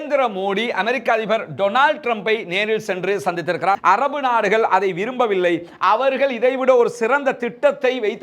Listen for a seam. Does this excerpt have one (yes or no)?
yes